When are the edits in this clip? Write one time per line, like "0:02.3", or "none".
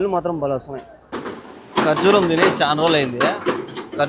0:01.0